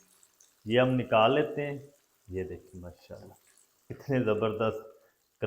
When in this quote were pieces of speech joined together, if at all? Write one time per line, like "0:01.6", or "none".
0:03.9